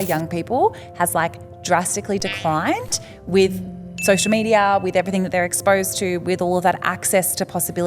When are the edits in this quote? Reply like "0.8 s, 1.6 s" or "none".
none